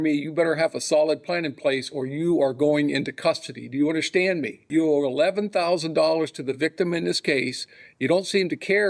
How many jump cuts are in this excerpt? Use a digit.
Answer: 1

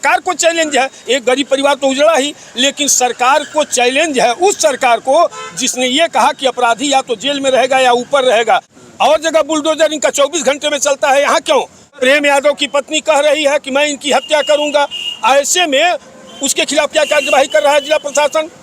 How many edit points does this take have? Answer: 2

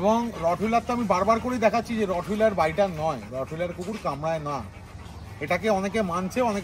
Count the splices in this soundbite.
0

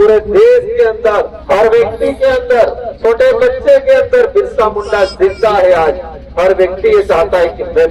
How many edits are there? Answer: 2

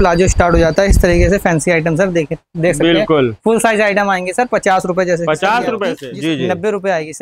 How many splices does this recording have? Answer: 1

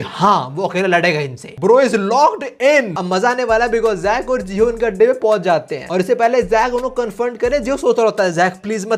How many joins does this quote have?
0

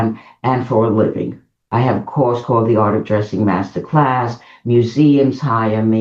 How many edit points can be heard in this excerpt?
1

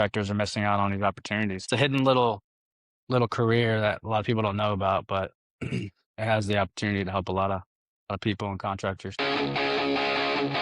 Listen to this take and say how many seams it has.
2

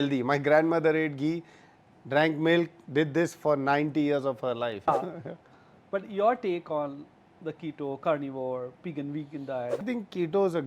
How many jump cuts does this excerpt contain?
2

